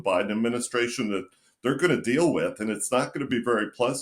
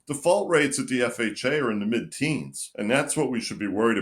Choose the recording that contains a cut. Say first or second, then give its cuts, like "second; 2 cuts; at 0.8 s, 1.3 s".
second; 1 cut; at 2.6 s